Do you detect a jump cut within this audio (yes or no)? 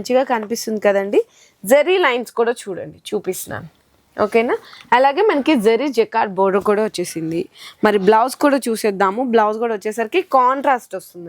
no